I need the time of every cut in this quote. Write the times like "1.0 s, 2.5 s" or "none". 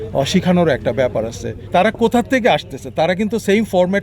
1.5 s